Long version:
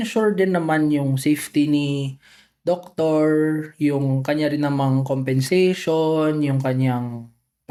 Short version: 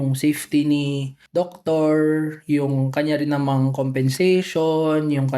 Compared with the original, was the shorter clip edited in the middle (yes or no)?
yes